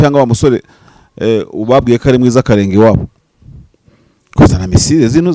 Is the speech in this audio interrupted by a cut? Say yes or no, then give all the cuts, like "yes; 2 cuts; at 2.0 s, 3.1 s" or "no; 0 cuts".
no; 0 cuts